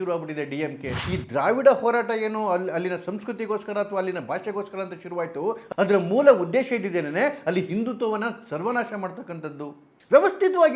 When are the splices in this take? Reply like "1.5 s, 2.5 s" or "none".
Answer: 1.1 s